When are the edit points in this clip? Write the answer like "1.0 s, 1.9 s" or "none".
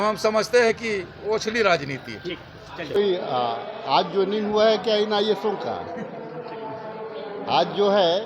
3.0 s